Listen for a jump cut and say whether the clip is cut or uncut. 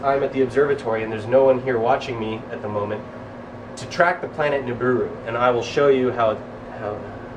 uncut